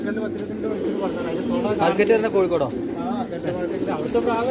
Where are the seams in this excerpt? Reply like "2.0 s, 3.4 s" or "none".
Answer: none